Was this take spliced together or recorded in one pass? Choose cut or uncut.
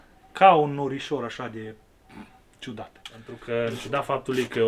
cut